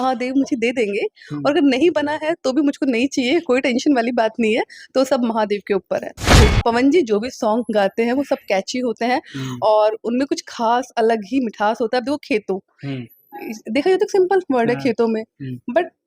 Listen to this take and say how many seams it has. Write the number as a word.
one